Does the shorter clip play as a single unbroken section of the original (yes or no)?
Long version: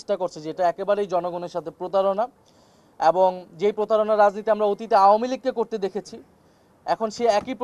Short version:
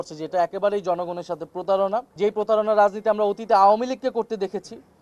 no